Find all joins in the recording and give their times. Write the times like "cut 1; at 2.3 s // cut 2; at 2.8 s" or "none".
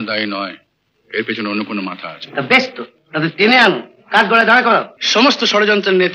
cut 1; at 5.0 s